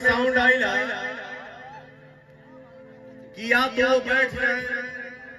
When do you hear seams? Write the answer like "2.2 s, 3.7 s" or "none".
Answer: none